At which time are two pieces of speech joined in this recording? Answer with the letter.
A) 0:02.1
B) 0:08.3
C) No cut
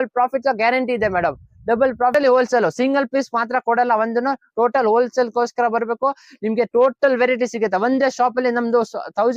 A